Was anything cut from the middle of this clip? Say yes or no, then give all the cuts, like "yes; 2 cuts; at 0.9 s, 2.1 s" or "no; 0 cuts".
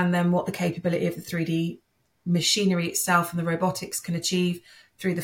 no; 0 cuts